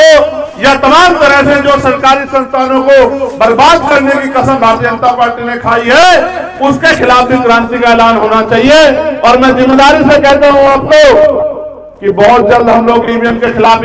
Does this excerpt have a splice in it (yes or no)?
no